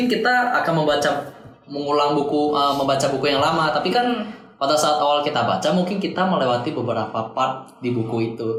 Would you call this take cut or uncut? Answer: uncut